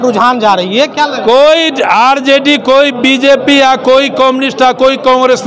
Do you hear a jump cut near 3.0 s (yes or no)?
no